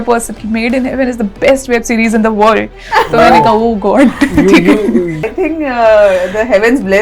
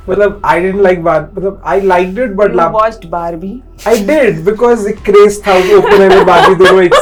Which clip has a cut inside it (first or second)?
first